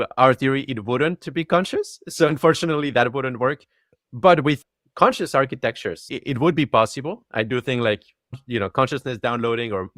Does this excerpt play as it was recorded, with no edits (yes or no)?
no